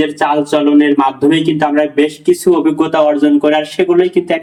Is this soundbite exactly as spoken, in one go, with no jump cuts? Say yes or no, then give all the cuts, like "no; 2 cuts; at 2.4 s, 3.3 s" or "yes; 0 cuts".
yes; 0 cuts